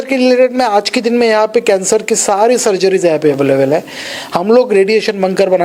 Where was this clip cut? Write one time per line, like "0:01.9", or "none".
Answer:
none